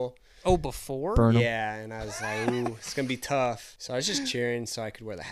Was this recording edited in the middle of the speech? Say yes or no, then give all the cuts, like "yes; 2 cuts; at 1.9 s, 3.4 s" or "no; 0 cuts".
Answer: yes; 1 cut; at 3.7 s